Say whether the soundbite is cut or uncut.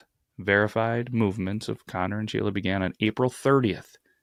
uncut